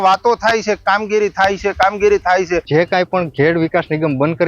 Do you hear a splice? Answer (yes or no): yes